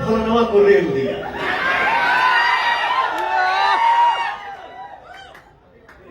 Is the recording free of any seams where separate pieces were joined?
yes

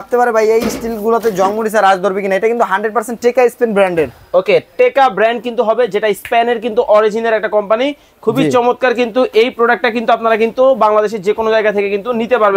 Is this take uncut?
yes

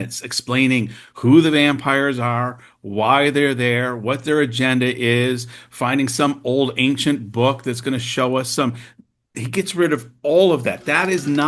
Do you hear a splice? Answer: no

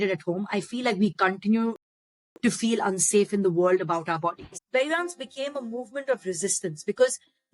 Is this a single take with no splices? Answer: no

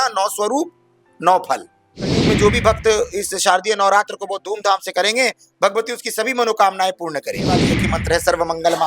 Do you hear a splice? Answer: yes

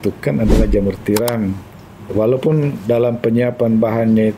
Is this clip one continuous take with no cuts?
no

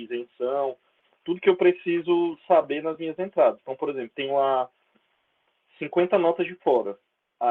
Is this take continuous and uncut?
yes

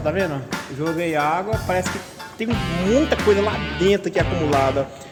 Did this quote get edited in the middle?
no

